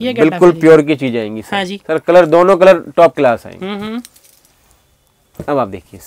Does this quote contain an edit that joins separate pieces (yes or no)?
no